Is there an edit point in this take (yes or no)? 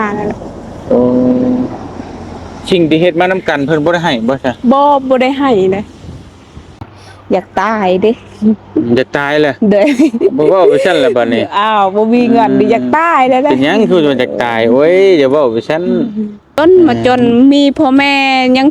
yes